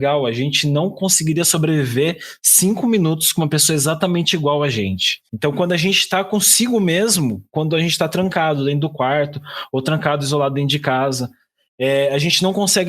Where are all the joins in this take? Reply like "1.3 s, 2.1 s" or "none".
5.2 s

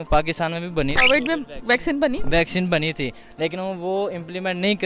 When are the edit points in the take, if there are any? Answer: none

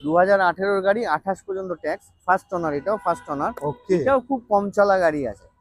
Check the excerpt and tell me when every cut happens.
none

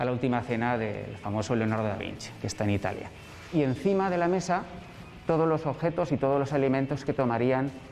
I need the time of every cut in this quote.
3.5 s

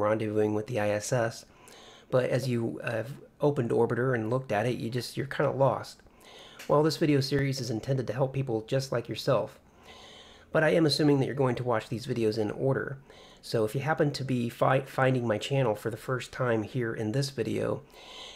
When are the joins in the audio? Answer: none

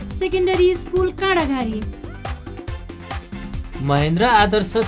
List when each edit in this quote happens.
none

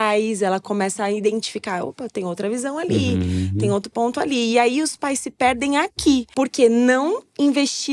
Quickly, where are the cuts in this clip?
6.3 s

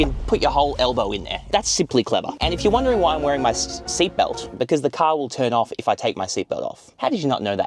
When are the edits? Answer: 2.4 s, 4.4 s

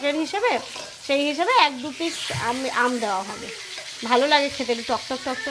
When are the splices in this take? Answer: none

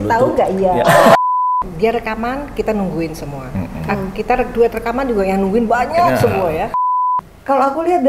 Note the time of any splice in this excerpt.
1.2 s, 6.8 s

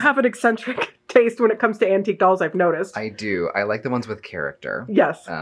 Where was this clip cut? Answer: none

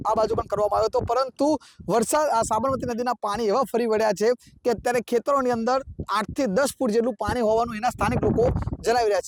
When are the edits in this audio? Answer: none

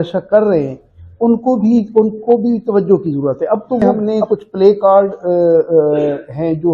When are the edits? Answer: 3.9 s

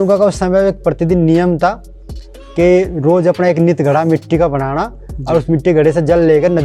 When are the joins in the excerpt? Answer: none

